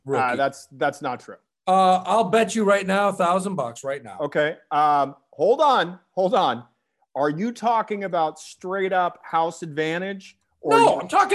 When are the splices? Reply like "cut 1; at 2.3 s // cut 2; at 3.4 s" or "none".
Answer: none